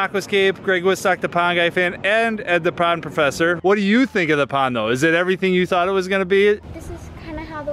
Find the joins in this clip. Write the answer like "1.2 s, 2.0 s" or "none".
3.6 s, 6.6 s

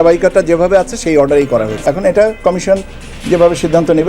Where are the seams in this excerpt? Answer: 1.8 s

